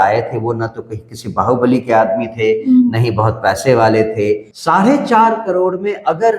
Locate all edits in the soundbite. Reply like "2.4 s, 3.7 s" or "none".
4.5 s